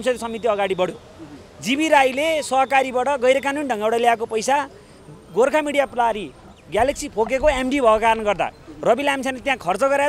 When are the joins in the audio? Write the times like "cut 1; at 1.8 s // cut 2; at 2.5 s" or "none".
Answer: none